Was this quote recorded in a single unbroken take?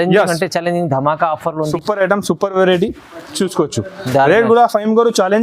no; 1 cut; at 1.7 s

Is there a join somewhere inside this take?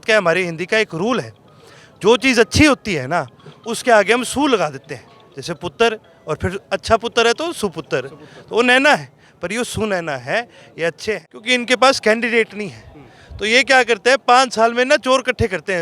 yes; 1 cut; at 11.3 s

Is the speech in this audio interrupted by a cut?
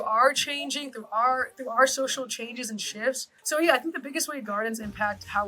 yes; 1 cut; at 3.3 s

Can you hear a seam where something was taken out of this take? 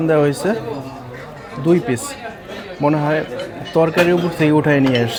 no; 0 cuts

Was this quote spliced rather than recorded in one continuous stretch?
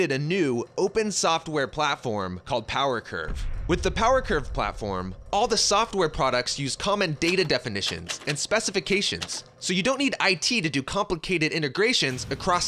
yes; 1 cut; at 2.0 s

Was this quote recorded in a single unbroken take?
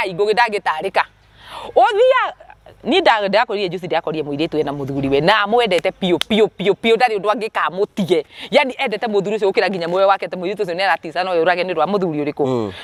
yes; 0 cuts

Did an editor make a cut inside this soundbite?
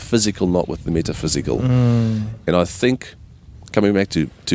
no; 0 cuts

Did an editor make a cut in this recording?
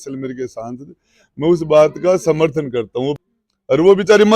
yes; 1 cut; at 3.1 s

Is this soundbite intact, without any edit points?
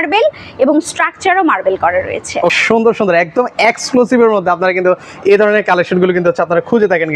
no; 1 cut; at 2.6 s

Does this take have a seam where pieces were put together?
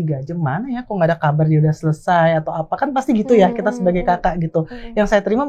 no; 0 cuts

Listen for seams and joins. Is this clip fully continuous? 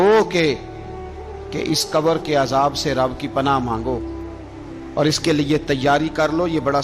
yes; 0 cuts

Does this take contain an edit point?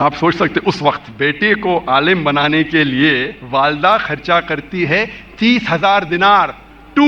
yes; 2 cuts; at 1.1 s, 3.3 s

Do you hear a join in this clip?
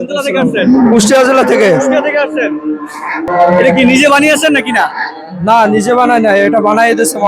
no; 0 cuts

